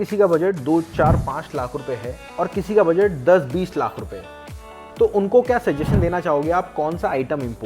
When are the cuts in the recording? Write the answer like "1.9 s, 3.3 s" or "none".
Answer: none